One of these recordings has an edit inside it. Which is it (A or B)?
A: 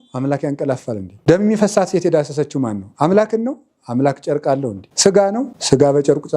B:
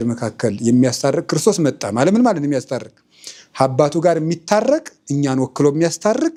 A